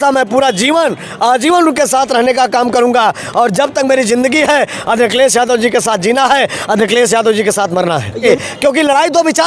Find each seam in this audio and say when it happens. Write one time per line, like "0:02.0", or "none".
0:08.1